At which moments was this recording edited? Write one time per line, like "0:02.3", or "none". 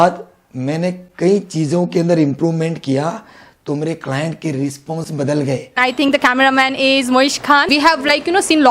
0:05.8